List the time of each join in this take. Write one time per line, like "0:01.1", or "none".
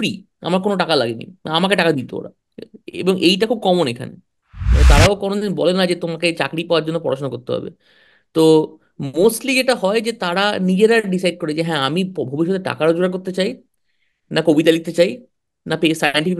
0:04.7